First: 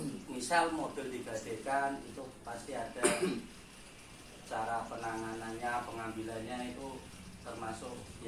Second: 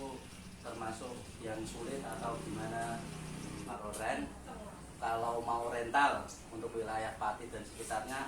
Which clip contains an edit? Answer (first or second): second